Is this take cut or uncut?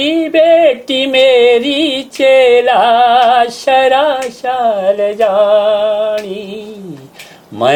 uncut